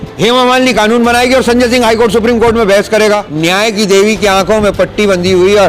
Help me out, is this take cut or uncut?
cut